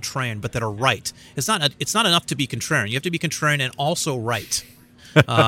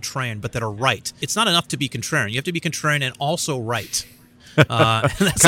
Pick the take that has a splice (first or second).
second